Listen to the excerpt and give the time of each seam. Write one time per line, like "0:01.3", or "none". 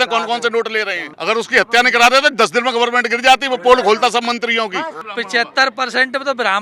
0:01.0
0:05.1

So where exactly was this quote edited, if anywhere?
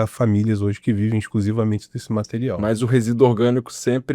0:02.6

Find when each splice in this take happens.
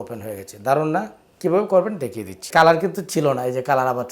0:02.4

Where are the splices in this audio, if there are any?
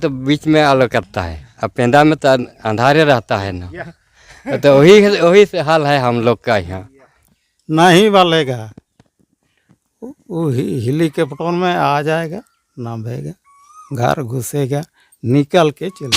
0:07.3

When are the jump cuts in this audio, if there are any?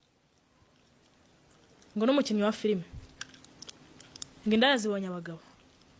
none

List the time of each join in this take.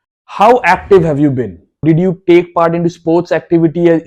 0:01.8

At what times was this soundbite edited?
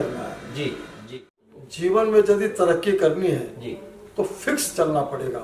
0:01.6

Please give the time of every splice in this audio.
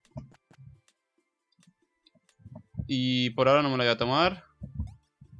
0:03.7

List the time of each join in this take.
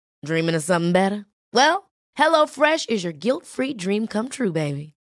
none

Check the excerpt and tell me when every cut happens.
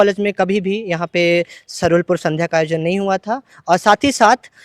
none

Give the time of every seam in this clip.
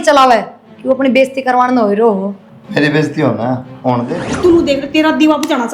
0:04.2

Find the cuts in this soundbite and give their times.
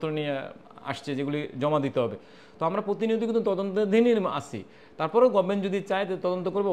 none

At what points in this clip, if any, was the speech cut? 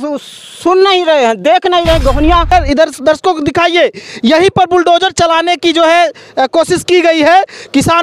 0:02.5

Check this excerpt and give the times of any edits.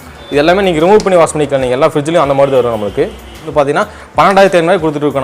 0:03.4

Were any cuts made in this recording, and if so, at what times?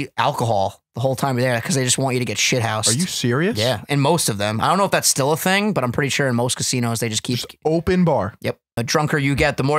0:08.8

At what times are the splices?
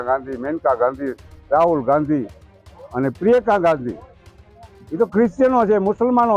none

